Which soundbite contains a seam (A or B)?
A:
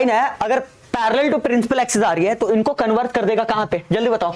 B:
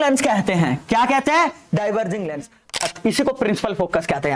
B